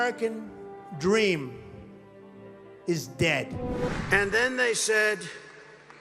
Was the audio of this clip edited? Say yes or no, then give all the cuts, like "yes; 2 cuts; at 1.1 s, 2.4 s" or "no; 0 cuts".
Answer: yes; 1 cut; at 4.0 s